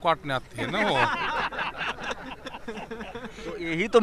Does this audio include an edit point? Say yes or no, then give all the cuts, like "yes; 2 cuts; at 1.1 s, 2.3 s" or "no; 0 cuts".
no; 0 cuts